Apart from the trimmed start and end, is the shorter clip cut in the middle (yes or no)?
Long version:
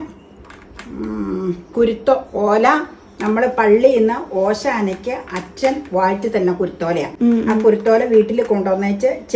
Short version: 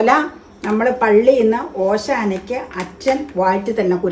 no